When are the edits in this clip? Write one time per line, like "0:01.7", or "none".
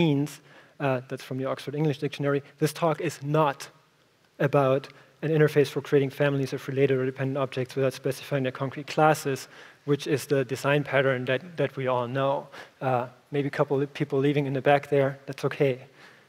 0:06.8